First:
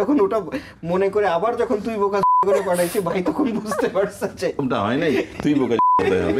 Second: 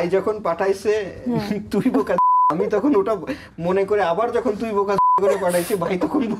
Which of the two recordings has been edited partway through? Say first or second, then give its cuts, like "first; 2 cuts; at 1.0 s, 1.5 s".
first; 1 cut; at 4.6 s